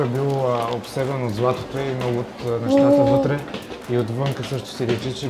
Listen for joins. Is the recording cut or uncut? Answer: uncut